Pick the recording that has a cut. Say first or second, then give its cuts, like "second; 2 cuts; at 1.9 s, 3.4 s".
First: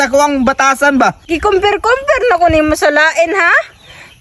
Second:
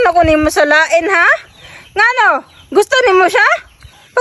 first; 1 cut; at 1.2 s